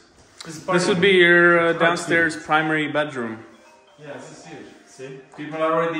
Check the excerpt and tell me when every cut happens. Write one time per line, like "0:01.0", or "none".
none